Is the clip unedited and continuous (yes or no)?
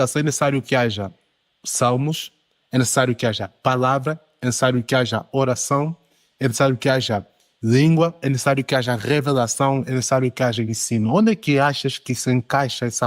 yes